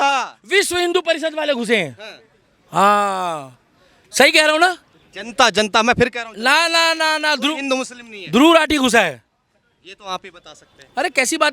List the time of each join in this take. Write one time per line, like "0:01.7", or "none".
none